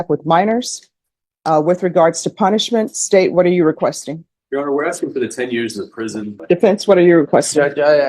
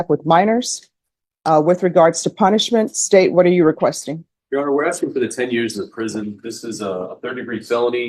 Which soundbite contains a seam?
first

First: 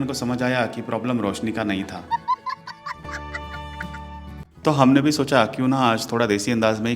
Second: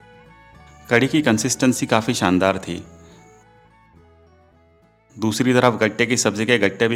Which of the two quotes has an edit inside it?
first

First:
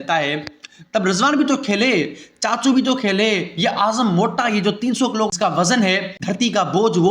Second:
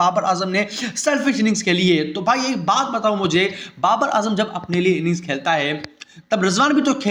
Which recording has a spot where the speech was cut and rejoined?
first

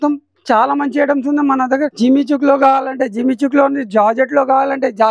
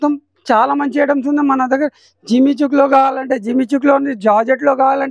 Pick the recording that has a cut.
first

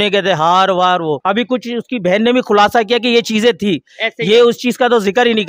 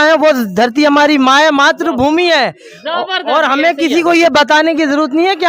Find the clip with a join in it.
first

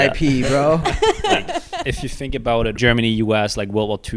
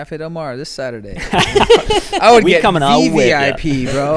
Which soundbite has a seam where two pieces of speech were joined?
first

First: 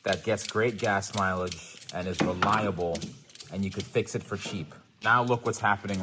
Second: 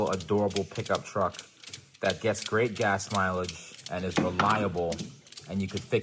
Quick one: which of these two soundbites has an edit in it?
first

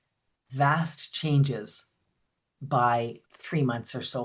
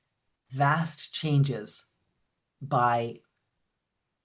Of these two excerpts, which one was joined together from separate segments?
first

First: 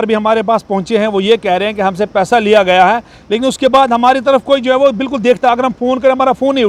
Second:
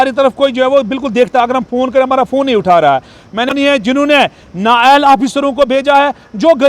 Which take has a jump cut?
second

